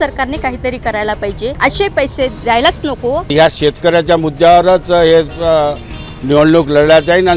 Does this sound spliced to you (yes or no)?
yes